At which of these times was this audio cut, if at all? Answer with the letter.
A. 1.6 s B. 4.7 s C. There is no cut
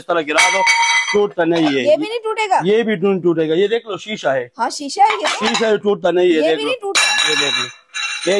C